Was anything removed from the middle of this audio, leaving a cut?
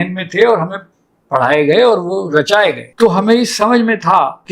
no; 0 cuts

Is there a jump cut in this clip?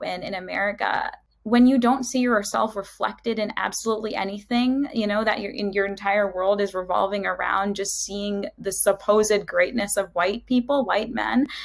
yes; 1 cut; at 1.3 s

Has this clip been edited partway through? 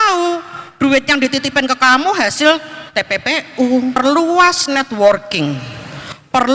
yes; 1 cut; at 4.0 s

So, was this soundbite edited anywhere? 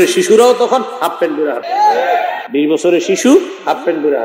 yes; 2 cuts; at 1.6 s, 2.4 s

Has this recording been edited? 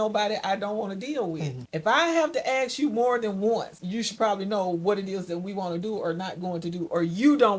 yes; 2 cuts; at 1.6 s, 3.8 s

